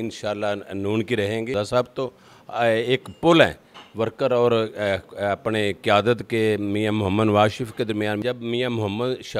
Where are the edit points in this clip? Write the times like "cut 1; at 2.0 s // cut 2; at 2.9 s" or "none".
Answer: cut 1; at 1.5 s // cut 2; at 8.2 s